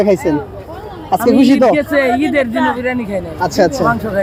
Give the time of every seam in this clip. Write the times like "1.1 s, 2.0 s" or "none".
none